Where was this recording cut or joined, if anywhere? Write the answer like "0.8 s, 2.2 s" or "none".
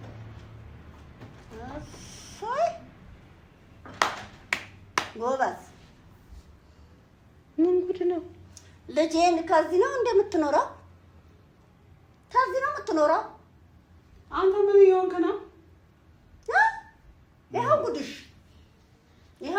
none